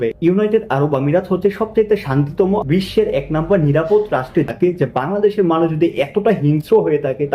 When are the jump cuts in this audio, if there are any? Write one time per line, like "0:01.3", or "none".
0:04.5